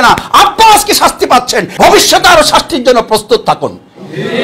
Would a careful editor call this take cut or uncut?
cut